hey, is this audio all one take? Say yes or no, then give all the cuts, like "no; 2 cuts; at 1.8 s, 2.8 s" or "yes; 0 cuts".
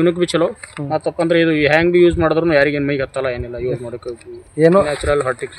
yes; 0 cuts